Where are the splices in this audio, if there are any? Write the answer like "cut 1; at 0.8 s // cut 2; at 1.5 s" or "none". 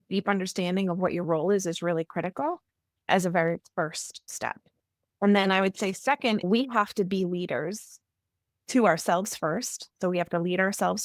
cut 1; at 6.5 s